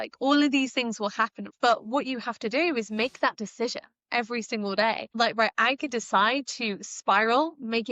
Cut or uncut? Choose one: cut